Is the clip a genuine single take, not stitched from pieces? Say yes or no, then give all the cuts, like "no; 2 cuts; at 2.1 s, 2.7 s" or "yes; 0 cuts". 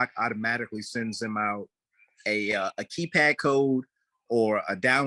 yes; 0 cuts